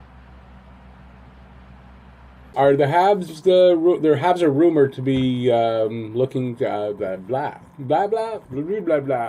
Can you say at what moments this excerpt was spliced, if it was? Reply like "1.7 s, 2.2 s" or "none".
2.5 s